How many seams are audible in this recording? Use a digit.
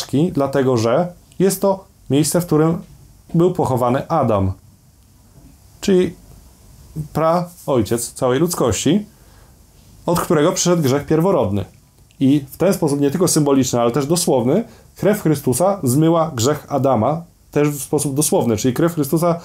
0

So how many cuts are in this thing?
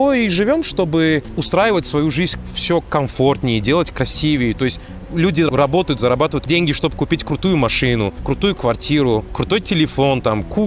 5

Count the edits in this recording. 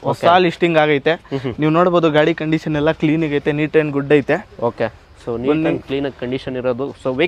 0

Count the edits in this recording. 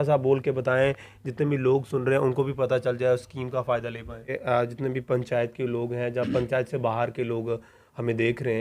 1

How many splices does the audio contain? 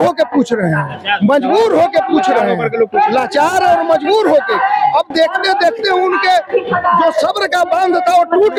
0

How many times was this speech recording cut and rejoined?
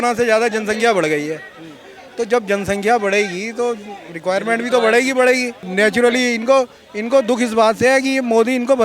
1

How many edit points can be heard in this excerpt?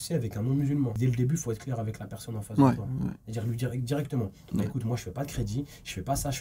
1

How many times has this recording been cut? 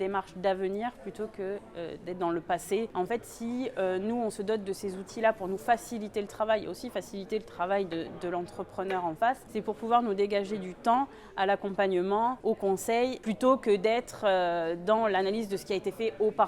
4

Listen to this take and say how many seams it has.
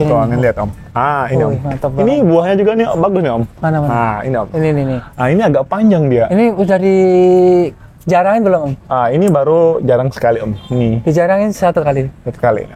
0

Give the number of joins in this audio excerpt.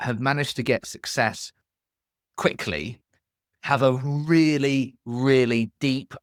0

